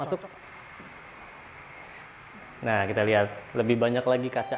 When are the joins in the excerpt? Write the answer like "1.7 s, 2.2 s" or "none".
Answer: none